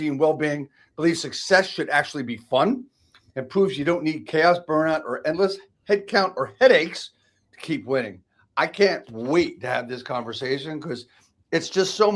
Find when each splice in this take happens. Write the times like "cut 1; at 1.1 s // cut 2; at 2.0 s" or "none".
none

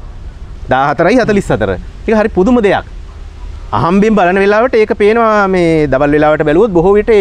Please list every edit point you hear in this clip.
none

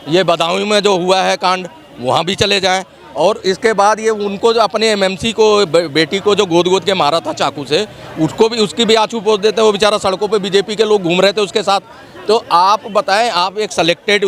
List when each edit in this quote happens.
none

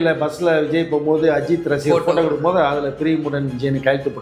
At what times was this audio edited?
none

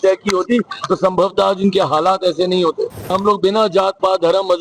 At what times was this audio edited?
cut 1; at 3.1 s

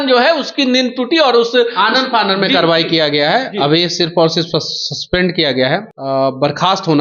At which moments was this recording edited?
cut 1; at 5.9 s

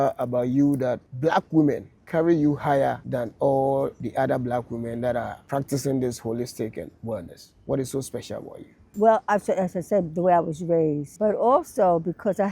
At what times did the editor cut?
cut 1; at 1.1 s // cut 2; at 1.9 s // cut 3; at 3.0 s // cut 4; at 4.0 s // cut 5; at 5.4 s // cut 6; at 8.9 s // cut 7; at 11.1 s

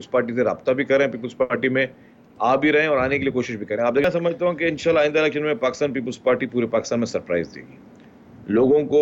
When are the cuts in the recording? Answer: cut 1; at 4.0 s

